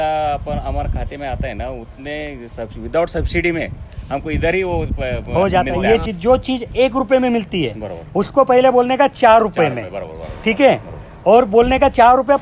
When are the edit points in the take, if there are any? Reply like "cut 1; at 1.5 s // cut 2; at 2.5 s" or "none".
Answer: cut 1; at 6.0 s